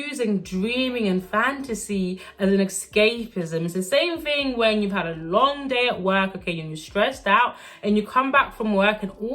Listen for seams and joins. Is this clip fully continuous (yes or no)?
yes